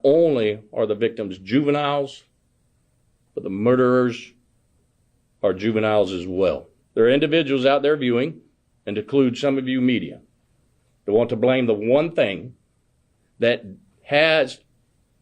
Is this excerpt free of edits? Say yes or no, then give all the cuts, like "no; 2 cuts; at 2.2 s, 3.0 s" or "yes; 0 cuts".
no; 1 cut; at 6.7 s